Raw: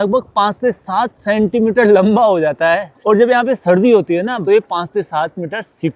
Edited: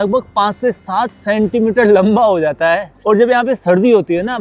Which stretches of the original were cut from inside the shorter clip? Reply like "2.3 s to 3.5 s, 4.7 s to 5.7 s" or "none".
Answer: none